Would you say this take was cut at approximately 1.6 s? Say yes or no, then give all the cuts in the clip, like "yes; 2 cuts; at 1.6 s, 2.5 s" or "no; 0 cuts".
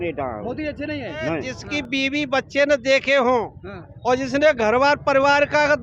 yes; 1 cut; at 1.6 s